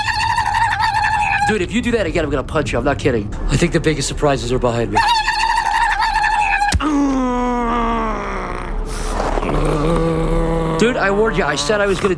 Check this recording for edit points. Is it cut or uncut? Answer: uncut